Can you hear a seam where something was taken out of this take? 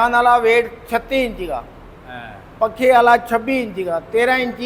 no; 0 cuts

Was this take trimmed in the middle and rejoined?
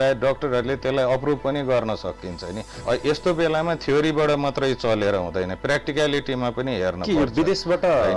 yes; 1 cut; at 2.8 s

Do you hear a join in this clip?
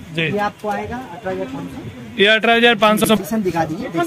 yes; 1 cut; at 3.0 s

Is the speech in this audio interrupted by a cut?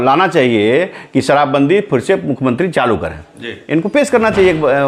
no; 0 cuts

